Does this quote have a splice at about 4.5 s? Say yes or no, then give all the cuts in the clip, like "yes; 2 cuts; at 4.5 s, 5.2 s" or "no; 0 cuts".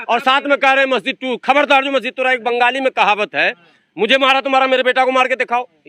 no; 0 cuts